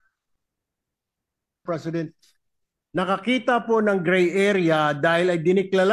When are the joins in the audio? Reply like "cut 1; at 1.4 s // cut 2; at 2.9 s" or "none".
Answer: cut 1; at 1.6 s